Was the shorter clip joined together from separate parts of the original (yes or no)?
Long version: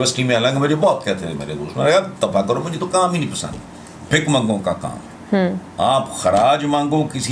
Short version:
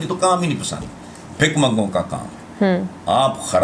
no